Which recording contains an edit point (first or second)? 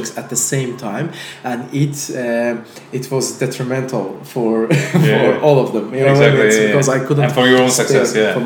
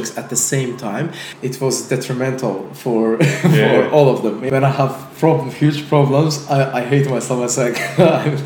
second